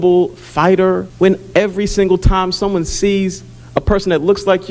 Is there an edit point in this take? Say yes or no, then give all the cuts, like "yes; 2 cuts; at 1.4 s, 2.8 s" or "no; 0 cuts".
yes; 1 cut; at 1.1 s